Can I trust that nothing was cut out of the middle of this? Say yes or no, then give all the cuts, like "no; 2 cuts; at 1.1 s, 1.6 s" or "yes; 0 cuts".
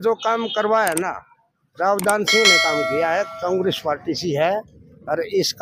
yes; 0 cuts